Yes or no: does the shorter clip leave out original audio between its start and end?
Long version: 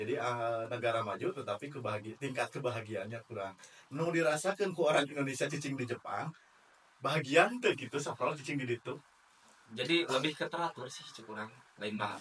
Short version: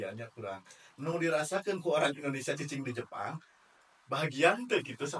no